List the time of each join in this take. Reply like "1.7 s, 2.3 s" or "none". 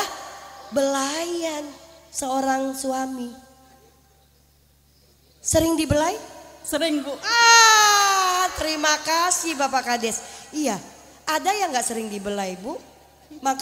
none